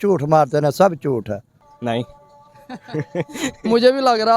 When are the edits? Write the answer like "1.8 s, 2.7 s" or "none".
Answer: 1.6 s